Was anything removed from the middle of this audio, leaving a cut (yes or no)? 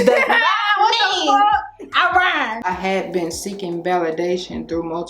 yes